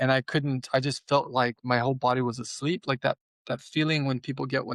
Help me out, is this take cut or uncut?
uncut